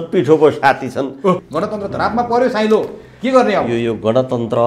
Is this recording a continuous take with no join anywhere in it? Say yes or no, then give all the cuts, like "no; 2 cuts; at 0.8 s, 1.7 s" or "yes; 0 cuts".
no; 1 cut; at 1.4 s